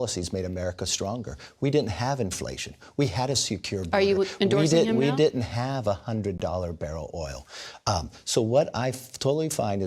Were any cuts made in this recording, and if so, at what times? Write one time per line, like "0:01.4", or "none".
0:01.4